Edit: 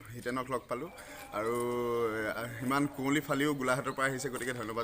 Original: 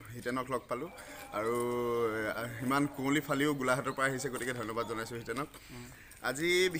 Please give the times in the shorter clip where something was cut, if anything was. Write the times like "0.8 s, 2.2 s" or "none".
none

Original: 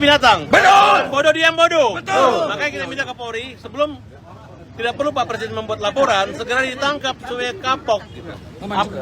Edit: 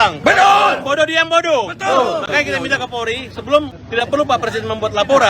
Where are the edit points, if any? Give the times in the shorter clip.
3.8 s

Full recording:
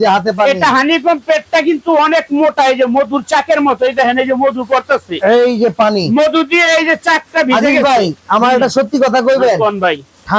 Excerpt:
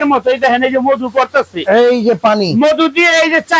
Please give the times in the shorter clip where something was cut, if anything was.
none

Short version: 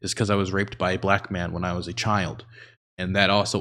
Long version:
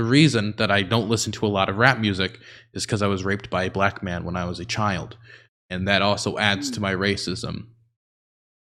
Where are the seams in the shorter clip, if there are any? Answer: none

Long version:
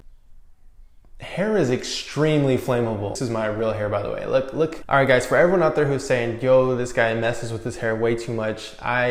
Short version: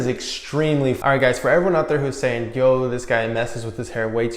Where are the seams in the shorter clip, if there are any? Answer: 1.0 s

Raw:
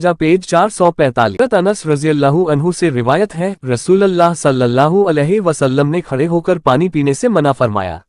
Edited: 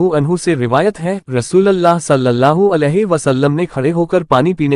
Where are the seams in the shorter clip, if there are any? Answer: none

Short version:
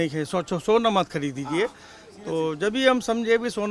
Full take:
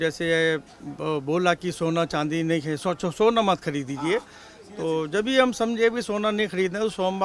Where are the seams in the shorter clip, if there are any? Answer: none

